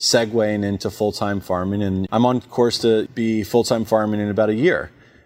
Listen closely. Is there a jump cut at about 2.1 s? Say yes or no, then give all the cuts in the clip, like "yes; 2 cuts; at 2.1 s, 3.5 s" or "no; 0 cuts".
yes; 2 cuts; at 2.1 s, 3.1 s